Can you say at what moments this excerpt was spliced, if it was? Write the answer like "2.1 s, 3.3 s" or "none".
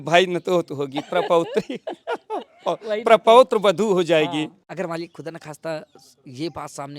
4.6 s